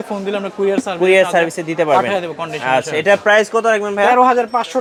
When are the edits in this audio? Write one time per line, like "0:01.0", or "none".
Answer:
none